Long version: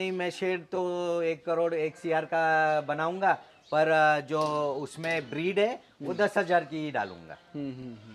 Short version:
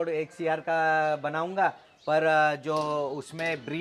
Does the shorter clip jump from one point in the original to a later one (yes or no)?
no